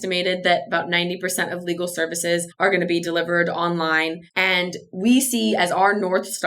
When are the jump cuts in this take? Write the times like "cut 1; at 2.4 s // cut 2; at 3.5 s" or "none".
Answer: cut 1; at 2.5 s // cut 2; at 4.3 s